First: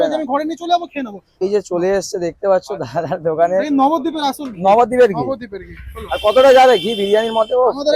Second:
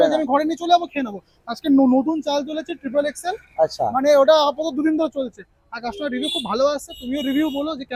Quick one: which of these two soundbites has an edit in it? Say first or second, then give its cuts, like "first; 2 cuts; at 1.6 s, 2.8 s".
first; 1 cut; at 1.4 s